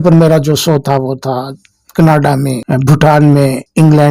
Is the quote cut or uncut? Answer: uncut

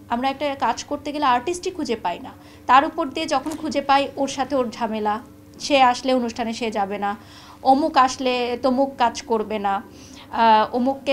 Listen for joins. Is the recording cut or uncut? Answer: uncut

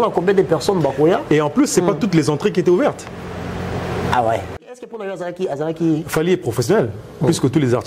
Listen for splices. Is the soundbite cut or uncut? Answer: cut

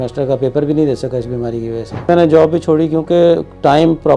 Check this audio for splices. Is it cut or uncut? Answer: cut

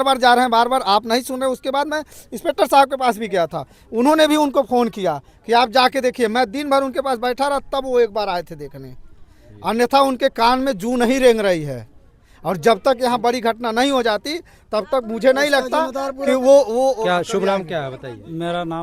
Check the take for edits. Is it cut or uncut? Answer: uncut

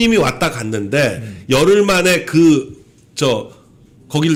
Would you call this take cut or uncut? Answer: uncut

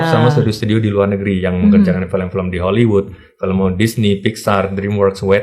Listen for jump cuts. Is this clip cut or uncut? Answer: uncut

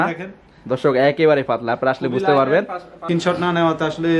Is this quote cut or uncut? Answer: cut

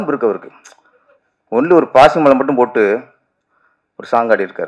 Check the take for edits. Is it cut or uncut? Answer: uncut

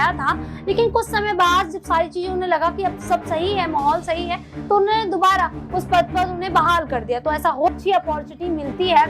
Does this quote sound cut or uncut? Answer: cut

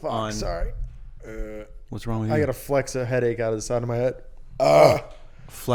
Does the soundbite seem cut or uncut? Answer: uncut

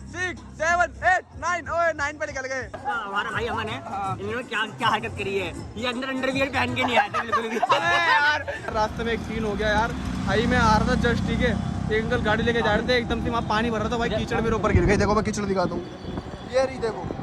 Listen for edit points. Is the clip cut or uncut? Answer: cut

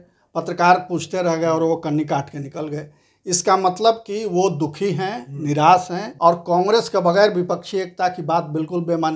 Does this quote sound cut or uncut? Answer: cut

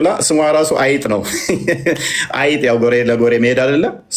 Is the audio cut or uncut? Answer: uncut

